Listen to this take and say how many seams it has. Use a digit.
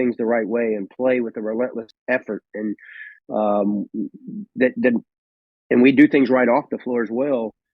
1